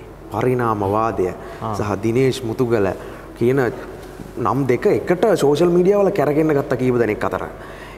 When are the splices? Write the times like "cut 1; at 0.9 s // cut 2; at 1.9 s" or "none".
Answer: none